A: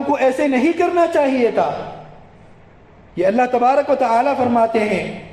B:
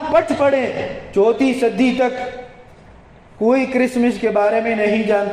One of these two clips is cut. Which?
B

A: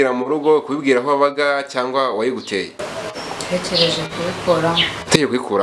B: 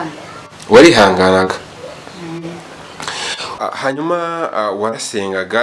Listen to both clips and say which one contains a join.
B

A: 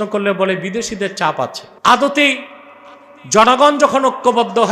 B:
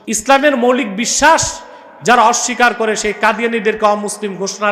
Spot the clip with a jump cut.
A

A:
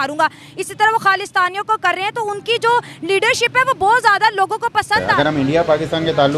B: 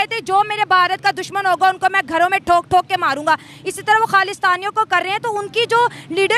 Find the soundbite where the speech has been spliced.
A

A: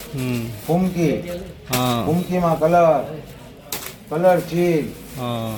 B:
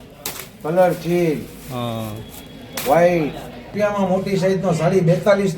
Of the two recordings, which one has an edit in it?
B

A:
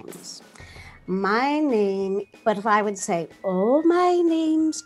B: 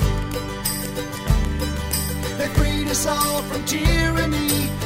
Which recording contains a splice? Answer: A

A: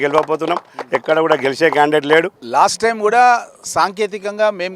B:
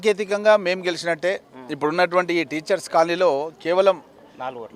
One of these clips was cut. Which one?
A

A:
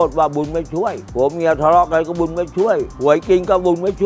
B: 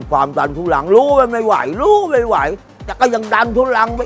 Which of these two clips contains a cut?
A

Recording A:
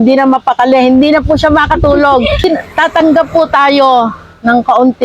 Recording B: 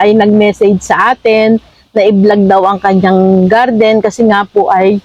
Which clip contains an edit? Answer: A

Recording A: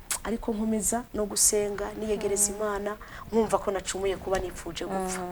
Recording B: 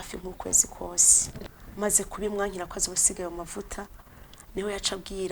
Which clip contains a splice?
B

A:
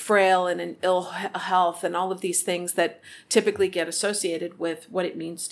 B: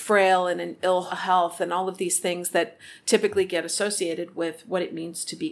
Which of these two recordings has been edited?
B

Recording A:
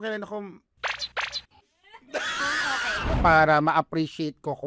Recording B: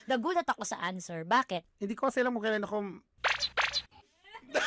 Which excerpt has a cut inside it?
A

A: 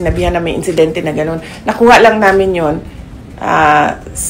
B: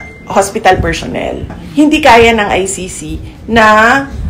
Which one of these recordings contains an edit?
B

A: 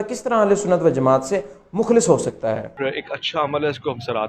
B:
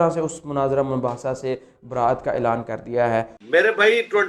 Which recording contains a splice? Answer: A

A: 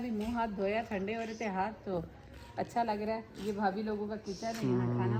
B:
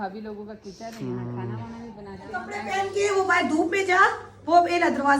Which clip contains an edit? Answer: B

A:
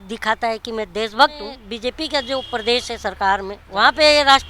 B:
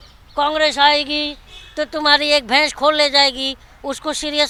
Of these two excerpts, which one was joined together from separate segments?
A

